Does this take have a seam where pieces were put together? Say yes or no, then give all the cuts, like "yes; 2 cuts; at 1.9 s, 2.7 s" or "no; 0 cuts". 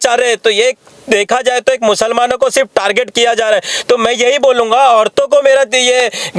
no; 0 cuts